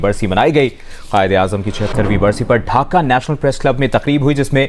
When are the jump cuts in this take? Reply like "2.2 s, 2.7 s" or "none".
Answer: none

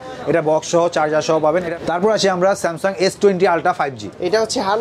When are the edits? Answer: 1.7 s

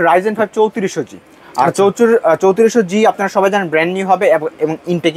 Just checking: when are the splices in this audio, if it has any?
none

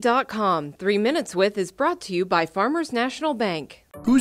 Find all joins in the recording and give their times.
none

